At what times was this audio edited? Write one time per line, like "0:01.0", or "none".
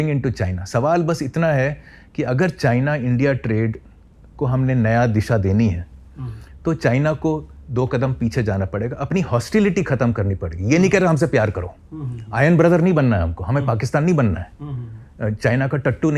none